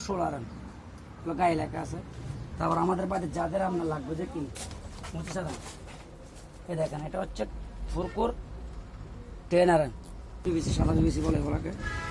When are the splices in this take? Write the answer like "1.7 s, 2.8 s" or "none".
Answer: 10.3 s